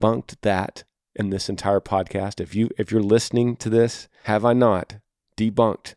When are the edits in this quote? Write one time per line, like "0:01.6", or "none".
0:04.1